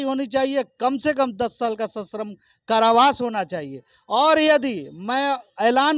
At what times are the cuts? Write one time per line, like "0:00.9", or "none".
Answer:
none